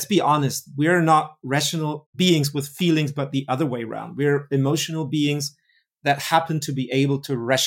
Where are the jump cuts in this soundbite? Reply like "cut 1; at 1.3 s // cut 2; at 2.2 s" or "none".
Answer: none